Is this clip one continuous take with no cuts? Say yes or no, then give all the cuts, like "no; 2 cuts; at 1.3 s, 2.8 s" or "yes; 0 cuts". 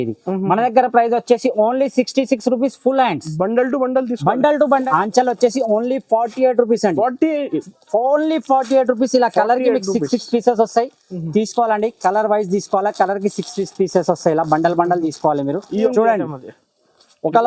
no; 2 cuts; at 4.8 s, 15.9 s